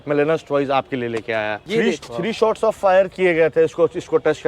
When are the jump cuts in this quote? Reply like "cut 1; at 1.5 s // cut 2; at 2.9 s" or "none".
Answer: cut 1; at 1.6 s